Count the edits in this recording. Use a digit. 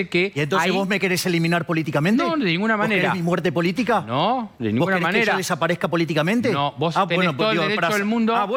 0